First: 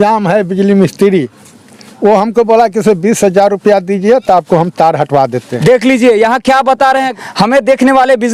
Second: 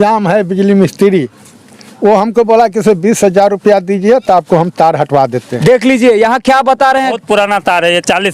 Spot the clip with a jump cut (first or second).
second